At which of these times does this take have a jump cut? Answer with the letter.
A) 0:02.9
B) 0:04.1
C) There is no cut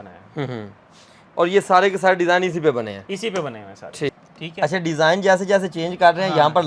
B